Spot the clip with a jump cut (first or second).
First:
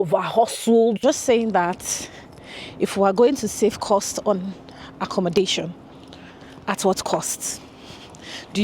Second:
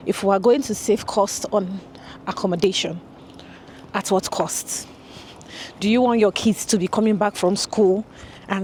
first